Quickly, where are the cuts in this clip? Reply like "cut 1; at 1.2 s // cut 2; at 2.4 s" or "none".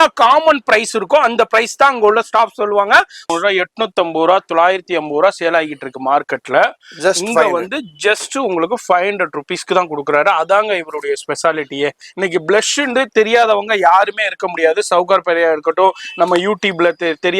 cut 1; at 3.2 s // cut 2; at 12.0 s